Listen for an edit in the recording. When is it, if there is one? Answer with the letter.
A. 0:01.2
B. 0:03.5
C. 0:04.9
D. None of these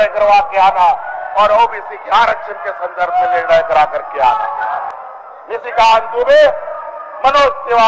C